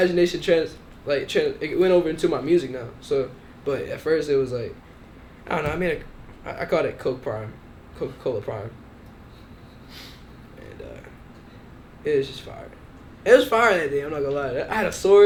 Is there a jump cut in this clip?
no; 0 cuts

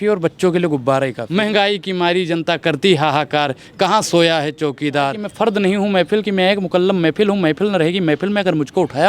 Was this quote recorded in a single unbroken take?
no; 2 cuts; at 1.2 s, 5.2 s

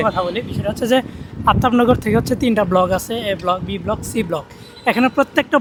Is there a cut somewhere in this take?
no; 0 cuts

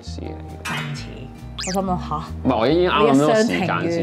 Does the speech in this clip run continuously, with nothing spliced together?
yes; 0 cuts

